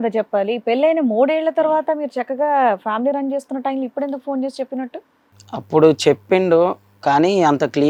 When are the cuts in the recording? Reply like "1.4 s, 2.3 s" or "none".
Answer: none